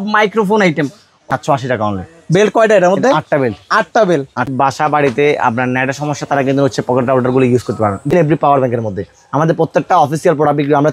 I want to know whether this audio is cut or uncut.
cut